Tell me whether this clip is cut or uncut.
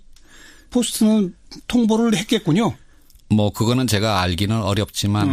cut